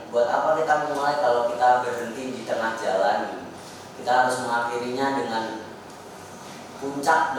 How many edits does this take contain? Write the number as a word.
zero